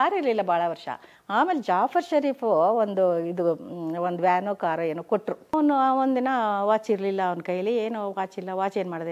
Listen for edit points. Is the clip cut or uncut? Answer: cut